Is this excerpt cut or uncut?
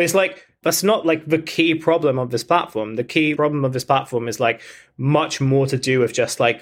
uncut